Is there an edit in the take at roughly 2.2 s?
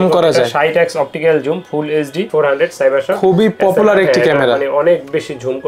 yes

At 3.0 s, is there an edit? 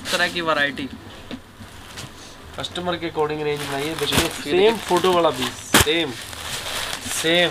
no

